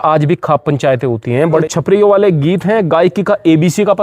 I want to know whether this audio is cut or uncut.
cut